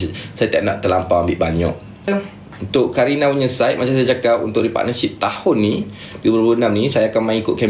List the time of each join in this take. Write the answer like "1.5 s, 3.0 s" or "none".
2.1 s